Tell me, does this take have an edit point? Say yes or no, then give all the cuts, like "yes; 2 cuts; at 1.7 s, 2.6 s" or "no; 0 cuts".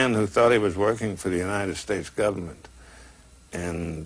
no; 0 cuts